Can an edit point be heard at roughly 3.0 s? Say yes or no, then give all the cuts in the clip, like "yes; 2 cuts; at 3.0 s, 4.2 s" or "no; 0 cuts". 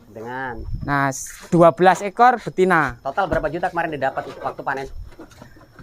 yes; 1 cut; at 3.0 s